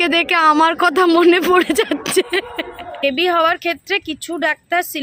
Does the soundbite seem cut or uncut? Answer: cut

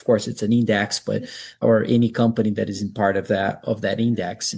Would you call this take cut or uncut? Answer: cut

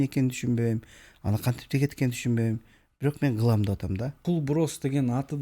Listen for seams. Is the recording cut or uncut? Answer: cut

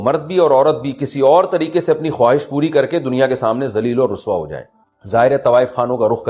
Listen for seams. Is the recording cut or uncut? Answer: uncut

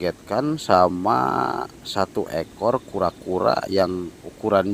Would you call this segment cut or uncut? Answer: uncut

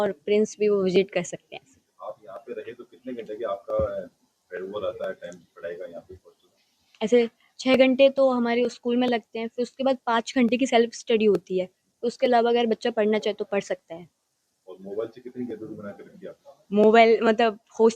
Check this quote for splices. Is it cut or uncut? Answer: uncut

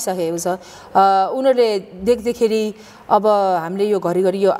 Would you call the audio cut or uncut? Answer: uncut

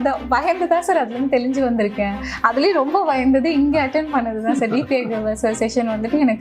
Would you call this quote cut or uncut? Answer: uncut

